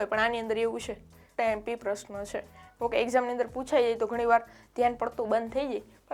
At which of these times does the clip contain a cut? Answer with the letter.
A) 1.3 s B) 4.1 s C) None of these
A